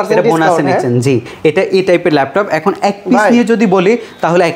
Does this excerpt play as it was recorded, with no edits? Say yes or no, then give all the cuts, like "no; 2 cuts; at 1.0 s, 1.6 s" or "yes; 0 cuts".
yes; 0 cuts